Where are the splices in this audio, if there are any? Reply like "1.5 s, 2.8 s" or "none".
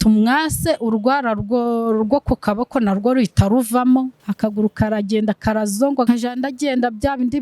4.2 s, 6.1 s